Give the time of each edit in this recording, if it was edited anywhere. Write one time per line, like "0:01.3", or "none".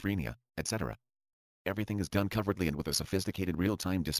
0:02.9

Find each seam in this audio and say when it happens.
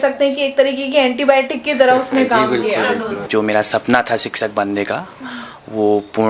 0:03.3

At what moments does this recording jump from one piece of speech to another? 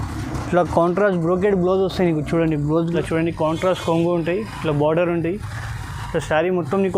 0:02.9

